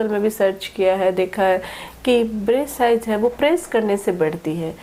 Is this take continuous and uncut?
yes; 0 cuts

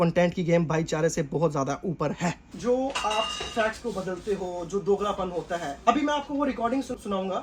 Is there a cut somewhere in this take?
no; 0 cuts

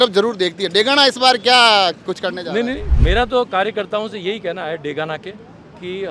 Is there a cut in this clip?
yes; 1 cut; at 2.9 s

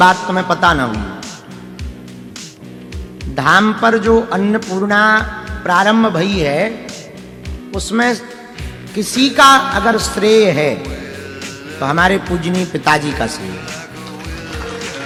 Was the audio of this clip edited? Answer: no; 0 cuts

